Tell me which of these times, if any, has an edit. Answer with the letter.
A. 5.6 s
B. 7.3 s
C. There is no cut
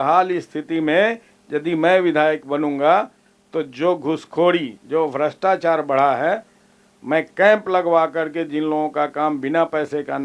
C